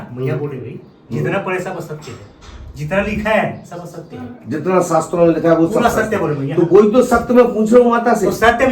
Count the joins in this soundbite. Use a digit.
0